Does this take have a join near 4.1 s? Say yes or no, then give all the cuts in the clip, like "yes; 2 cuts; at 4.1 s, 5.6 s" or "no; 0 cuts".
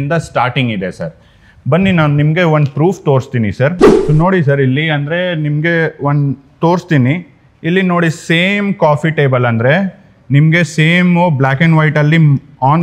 no; 0 cuts